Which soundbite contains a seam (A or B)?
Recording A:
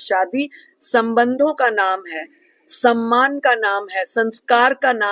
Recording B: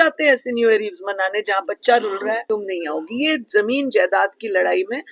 B